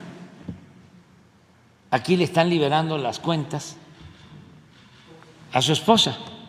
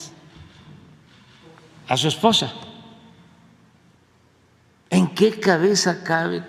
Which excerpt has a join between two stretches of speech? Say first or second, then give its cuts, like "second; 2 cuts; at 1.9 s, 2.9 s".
second; 1 cut; at 4.0 s